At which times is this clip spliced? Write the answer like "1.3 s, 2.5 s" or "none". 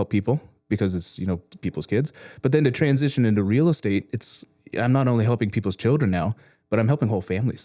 none